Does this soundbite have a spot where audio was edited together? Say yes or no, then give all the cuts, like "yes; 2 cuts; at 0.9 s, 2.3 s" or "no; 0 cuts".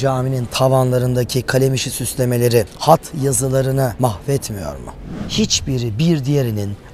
yes; 3 cuts; at 2.7 s, 3.9 s, 5.2 s